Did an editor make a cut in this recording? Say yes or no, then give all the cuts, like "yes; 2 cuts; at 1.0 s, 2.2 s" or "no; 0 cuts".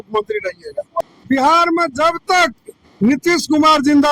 yes; 1 cut; at 1.0 s